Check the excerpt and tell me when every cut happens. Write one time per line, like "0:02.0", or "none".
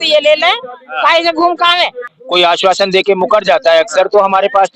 0:02.1